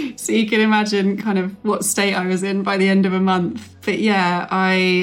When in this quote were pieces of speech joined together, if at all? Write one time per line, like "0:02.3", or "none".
0:03.7